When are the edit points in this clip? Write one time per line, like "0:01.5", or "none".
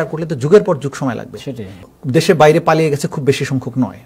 0:01.7